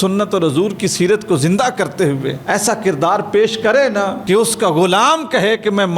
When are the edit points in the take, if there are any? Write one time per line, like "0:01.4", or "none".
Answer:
0:02.4
0:04.2